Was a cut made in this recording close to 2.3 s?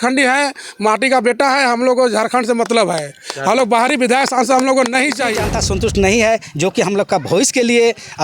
no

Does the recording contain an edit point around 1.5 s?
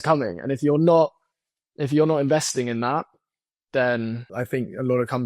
no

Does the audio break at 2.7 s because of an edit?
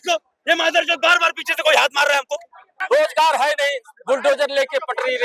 yes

